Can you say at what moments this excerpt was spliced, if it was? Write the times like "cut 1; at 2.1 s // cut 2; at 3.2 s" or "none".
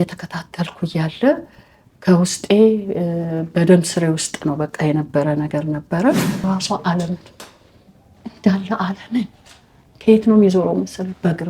cut 1; at 6.4 s